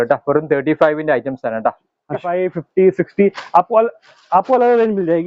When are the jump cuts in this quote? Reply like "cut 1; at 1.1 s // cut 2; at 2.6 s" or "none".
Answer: cut 1; at 2.2 s